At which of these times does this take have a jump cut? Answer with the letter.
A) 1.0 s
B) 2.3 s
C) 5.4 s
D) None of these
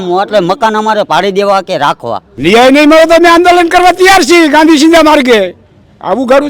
B